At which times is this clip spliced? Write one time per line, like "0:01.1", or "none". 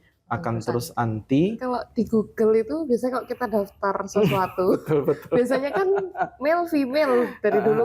0:01.6